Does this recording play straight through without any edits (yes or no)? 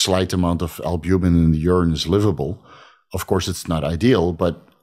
yes